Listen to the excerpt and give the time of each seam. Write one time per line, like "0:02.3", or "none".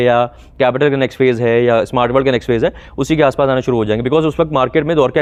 none

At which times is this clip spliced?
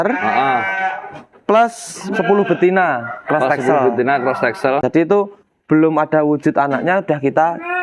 0:04.8

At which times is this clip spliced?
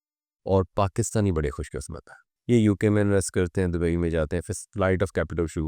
0:02.3

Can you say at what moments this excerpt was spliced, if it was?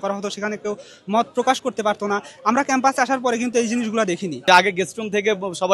0:04.4

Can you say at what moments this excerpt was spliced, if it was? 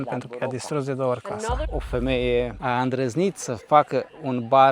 0:01.7

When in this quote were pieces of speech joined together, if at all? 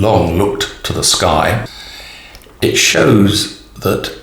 0:01.6

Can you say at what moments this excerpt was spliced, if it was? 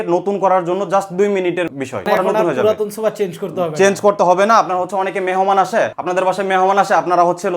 0:02.0
0:06.0

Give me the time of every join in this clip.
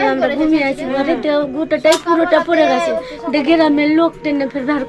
none

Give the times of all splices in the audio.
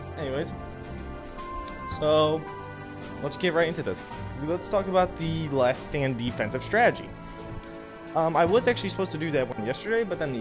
0:08.4

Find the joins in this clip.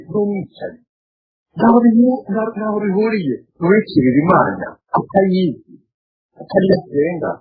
0:04.7

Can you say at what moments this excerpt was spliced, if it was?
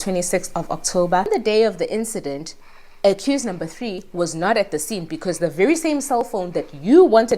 0:01.3

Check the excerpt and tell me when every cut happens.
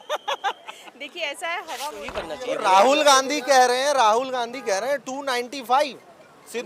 0:02.0

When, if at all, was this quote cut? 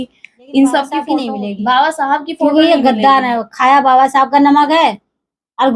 0:01.1

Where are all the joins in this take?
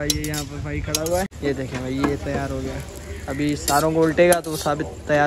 0:01.3

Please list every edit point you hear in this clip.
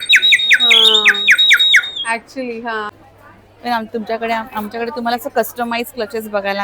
0:02.9

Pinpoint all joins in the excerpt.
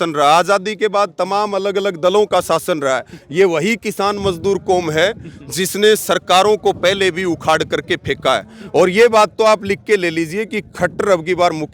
none

